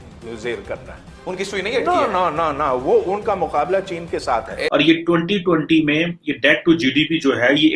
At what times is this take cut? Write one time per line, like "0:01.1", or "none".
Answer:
0:04.7